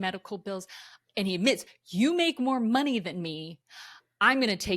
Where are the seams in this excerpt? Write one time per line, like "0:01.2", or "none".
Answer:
0:00.9